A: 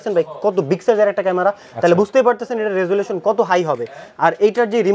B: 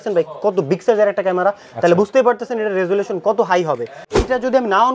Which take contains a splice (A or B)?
B